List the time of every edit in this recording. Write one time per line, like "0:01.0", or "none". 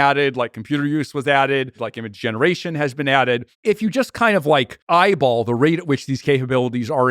0:01.9
0:03.5
0:04.8